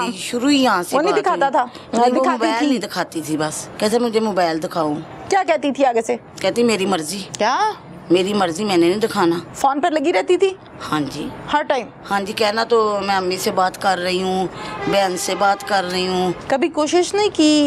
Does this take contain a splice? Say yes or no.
yes